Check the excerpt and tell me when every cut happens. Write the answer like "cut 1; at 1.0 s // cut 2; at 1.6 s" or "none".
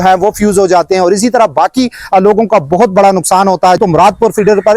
cut 1; at 3.8 s